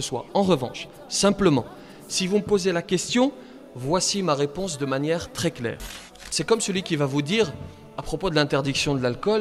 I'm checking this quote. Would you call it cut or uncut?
cut